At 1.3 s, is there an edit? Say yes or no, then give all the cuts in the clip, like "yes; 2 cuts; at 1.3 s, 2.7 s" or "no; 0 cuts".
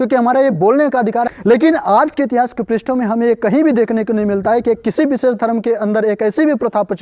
yes; 1 cut; at 1.3 s